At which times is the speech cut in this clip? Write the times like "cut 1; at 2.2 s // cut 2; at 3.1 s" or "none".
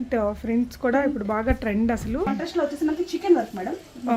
cut 1; at 2.3 s